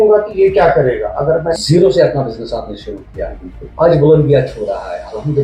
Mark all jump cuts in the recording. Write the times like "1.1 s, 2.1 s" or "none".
1.6 s